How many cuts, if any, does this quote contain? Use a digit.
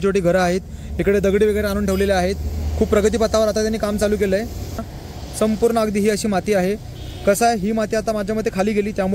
1